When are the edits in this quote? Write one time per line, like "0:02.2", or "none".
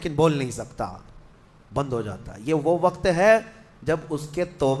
none